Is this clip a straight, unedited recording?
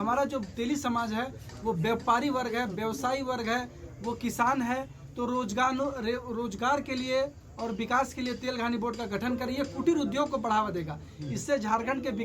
yes; 0 cuts

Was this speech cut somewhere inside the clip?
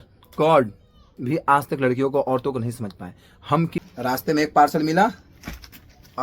yes; 1 cut; at 3.8 s

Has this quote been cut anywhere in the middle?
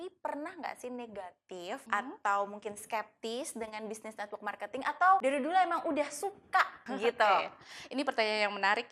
yes; 3 cuts; at 1.8 s, 5.2 s, 6.8 s

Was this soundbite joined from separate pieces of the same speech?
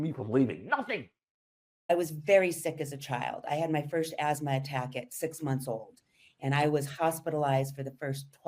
yes; 1 cut; at 1.9 s

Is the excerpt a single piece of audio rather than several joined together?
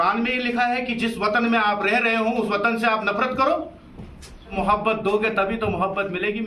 no; 1 cut; at 4.5 s

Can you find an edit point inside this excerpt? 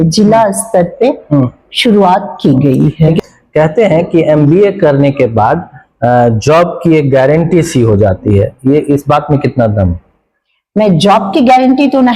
yes; 1 cut; at 3.2 s

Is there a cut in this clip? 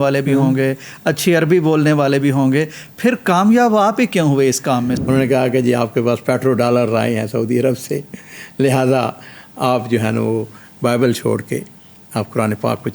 yes; 1 cut; at 5.0 s

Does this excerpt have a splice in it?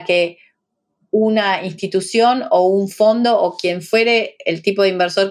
no; 0 cuts

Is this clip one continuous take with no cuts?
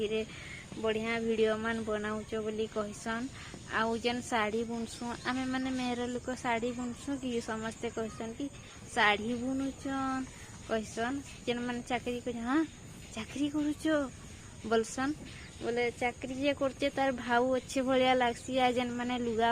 yes; 0 cuts

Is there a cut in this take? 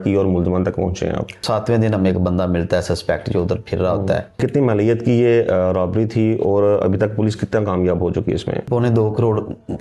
yes; 3 cuts; at 1.4 s, 4.4 s, 8.7 s

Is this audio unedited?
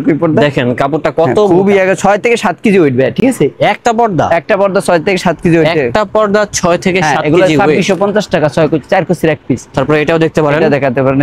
yes; 0 cuts

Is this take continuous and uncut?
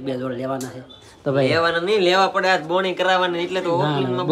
yes; 0 cuts

